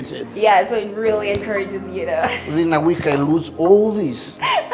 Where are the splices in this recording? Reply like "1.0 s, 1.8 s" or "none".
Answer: none